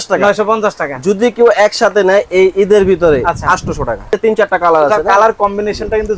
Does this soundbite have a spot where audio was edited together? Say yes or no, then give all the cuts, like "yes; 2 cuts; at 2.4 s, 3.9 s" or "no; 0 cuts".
yes; 1 cut; at 4.1 s